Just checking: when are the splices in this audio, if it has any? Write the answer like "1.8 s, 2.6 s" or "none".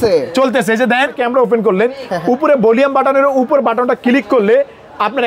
1.2 s